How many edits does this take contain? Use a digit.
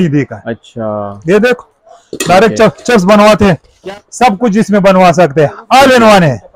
1